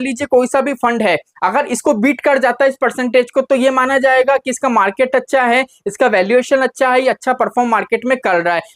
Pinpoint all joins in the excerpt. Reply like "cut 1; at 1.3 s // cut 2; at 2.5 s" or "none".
none